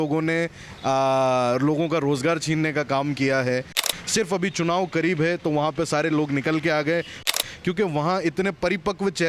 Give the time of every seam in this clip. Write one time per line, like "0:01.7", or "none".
0:03.9
0:07.3